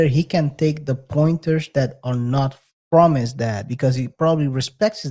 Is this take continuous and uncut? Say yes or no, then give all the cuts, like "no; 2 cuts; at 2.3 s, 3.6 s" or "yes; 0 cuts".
yes; 0 cuts